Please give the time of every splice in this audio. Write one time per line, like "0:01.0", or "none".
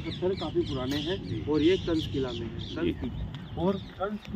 0:03.0